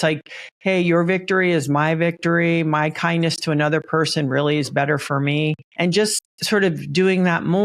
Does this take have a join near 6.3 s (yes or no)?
yes